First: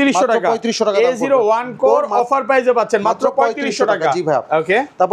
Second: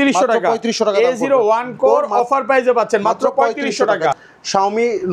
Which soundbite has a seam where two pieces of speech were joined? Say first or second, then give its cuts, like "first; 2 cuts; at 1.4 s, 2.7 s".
second; 1 cut; at 4.2 s